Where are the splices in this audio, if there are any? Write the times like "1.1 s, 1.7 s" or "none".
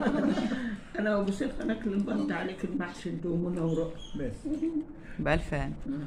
2.2 s